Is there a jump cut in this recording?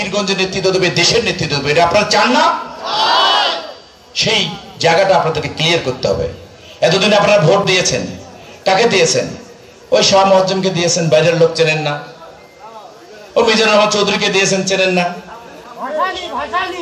no; 0 cuts

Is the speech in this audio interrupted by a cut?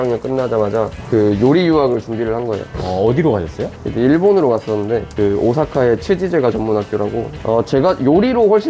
yes; 4 cuts; at 1.0 s, 2.7 s, 5.1 s, 7.3 s

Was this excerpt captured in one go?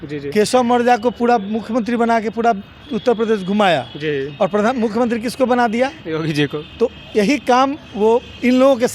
yes; 0 cuts

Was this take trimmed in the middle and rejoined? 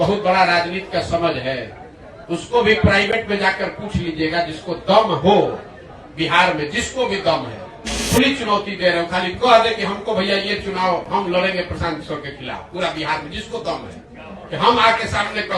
yes; 1 cut; at 7.9 s

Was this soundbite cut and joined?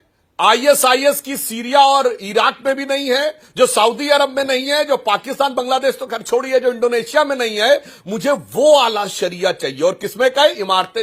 no; 0 cuts

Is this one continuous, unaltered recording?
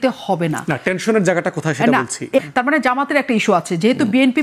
no; 1 cut; at 2.4 s

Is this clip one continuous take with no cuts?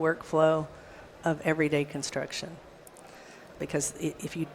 no; 1 cut; at 3.5 s

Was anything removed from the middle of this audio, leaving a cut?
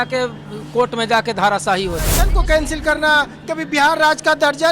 yes; 1 cut; at 2.3 s

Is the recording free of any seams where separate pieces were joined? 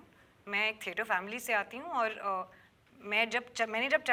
yes; 0 cuts

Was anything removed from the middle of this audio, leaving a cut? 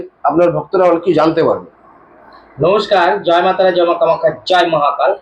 no; 0 cuts

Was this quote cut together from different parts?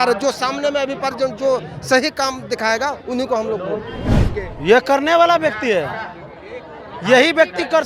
yes; 1 cut; at 4.1 s

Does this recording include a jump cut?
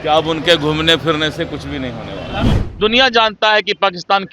yes; 1 cut; at 2.6 s

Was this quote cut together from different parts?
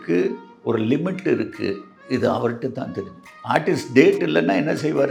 no; 0 cuts

